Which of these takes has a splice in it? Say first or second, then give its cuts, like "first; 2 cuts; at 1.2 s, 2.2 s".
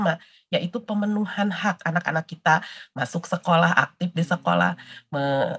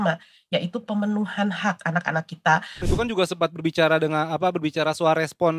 second; 1 cut; at 2.9 s